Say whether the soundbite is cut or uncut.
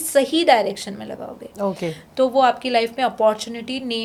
uncut